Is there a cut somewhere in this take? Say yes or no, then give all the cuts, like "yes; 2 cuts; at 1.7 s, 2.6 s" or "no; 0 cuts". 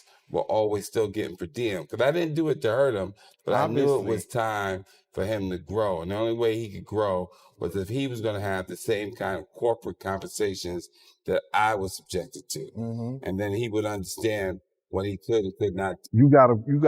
yes; 1 cut; at 15.9 s